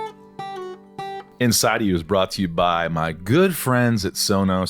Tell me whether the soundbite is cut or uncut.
cut